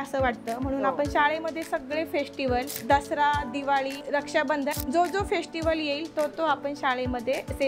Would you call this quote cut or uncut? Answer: cut